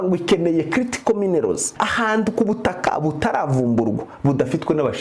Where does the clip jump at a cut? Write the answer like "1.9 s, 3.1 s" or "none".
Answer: 1.8 s